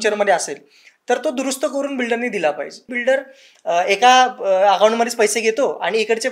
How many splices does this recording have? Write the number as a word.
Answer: one